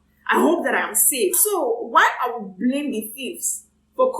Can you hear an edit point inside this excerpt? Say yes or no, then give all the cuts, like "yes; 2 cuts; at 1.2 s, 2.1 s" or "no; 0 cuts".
yes; 1 cut; at 1.4 s